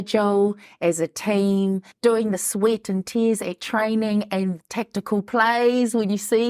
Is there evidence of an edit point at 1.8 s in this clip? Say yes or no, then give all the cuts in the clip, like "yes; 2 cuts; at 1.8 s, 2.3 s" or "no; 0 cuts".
no; 1 cut; at 4.6 s